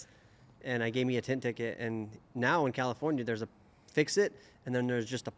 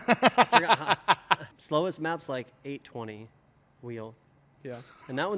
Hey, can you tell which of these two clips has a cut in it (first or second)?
second